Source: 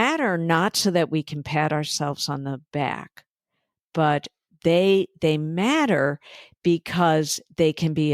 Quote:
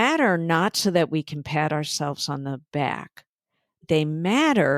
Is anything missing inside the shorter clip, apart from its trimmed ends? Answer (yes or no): yes